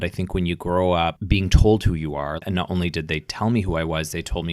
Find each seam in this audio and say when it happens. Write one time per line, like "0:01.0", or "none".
0:02.4